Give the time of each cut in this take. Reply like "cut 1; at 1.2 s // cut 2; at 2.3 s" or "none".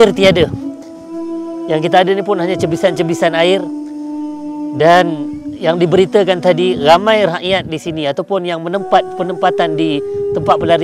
none